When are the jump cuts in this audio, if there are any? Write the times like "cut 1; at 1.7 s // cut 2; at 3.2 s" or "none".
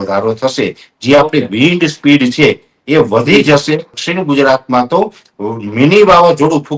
cut 1; at 4.0 s

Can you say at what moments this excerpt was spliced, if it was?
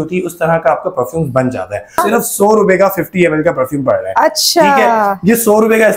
cut 1; at 2.0 s

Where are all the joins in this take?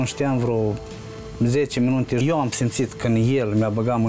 cut 1; at 2.2 s

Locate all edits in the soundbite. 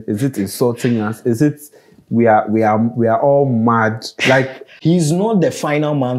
cut 1; at 4.6 s

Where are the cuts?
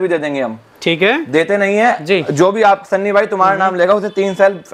none

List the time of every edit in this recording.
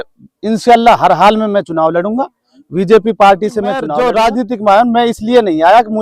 cut 1; at 3.9 s

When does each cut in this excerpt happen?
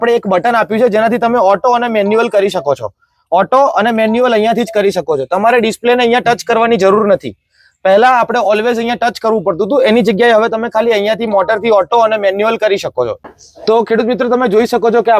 none

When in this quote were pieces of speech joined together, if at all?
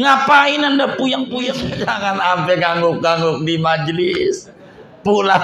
cut 1; at 1.7 s

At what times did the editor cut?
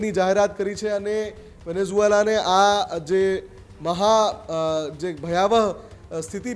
none

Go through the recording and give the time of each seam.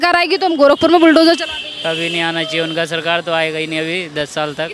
none

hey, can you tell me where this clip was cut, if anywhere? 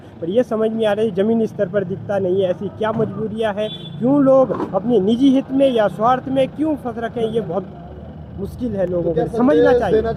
none

